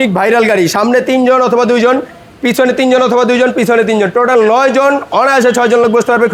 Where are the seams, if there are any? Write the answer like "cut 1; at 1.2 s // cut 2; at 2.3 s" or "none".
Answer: none

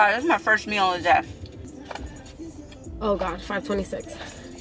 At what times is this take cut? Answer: none

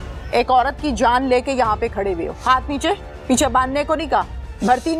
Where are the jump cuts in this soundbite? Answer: none

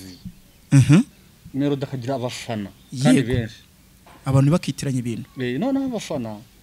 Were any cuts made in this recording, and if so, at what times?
none

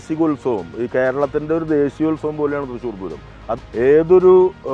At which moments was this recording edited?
cut 1; at 3.6 s

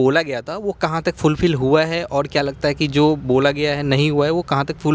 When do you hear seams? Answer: none

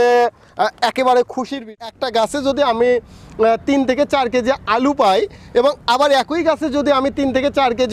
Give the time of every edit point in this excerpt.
cut 1; at 1.7 s

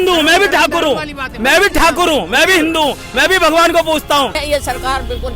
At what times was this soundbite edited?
cut 1; at 4.4 s

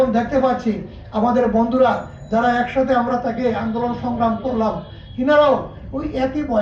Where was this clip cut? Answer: none

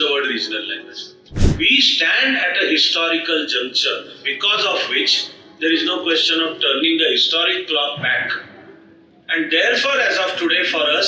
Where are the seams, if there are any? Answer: cut 1; at 1.4 s

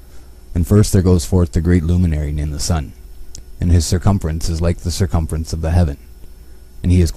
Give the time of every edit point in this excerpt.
cut 1; at 5.1 s

